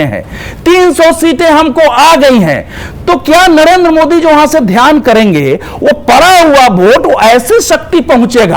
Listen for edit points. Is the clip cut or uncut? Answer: uncut